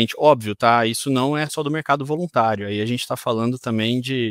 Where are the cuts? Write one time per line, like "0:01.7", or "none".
none